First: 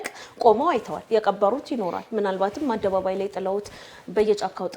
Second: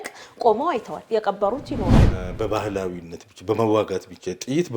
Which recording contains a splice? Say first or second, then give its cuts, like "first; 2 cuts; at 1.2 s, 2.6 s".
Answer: second; 1 cut; at 2.0 s